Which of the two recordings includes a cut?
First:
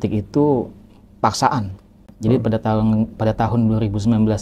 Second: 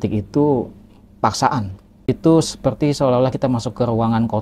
second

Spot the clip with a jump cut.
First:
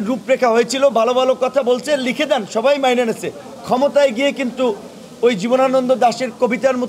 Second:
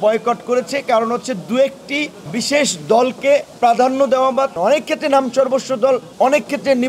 second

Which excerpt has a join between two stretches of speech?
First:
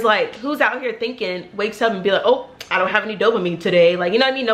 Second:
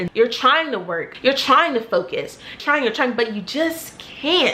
second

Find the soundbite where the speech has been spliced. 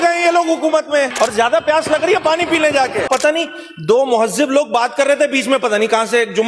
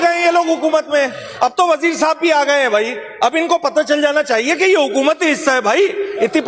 first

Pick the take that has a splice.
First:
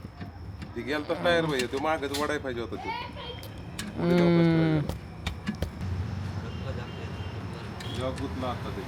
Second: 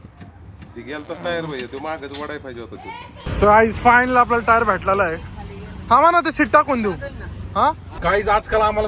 second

